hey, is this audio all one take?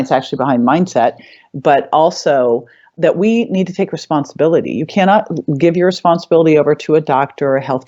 no; 1 cut; at 2.9 s

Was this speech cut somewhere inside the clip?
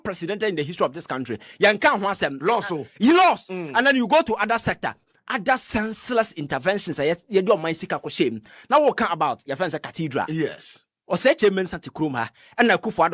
no; 0 cuts

